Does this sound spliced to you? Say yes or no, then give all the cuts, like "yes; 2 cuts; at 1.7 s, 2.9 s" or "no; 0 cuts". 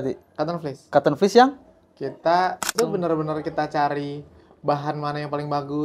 yes; 1 cut; at 2.7 s